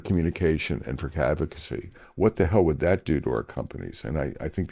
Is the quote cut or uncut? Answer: uncut